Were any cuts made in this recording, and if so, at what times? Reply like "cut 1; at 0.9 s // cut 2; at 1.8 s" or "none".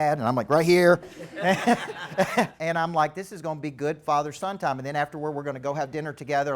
cut 1; at 2.6 s